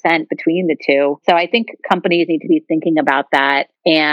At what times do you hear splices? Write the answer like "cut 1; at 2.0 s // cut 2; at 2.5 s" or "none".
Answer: none